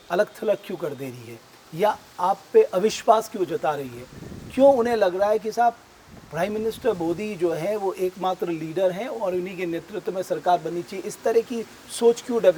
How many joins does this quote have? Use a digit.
0